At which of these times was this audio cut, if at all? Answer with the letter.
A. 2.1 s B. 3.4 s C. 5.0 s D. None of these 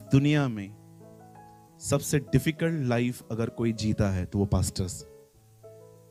D